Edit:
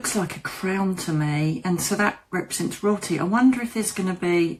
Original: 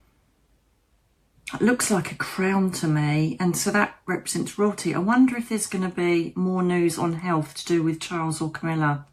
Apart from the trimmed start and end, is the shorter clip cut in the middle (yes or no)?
no